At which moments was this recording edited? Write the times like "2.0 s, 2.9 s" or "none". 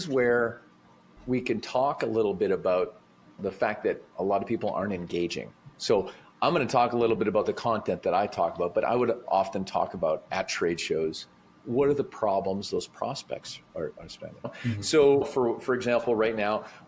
5.7 s